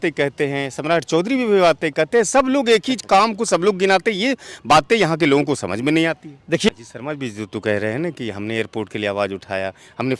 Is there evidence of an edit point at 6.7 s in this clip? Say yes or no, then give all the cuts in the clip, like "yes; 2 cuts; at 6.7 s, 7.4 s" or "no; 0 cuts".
yes; 1 cut; at 6.7 s